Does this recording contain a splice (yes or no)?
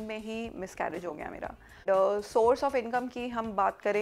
yes